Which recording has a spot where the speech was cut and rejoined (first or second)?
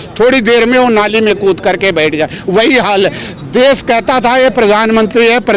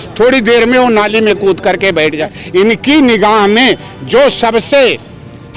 second